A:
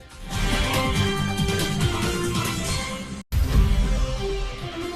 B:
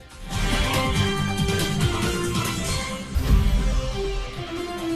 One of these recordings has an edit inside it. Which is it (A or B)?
B